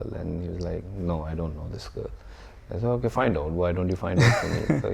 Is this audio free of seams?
yes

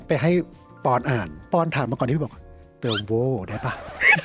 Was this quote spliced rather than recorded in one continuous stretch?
yes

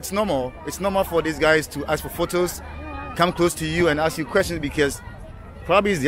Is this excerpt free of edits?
yes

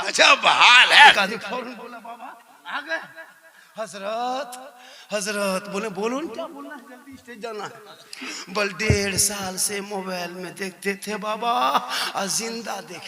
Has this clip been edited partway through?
yes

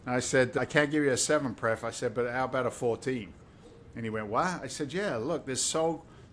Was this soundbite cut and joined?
no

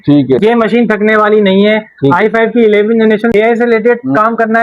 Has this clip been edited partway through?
yes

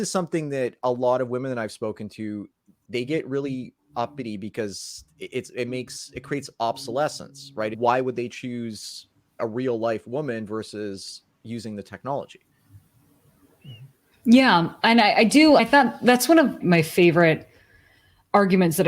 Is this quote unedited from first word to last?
no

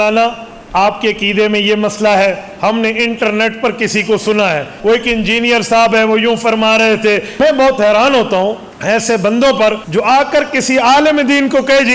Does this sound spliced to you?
yes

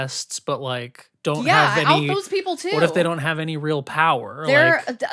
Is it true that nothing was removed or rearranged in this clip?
yes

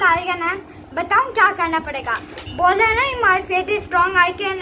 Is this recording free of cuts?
yes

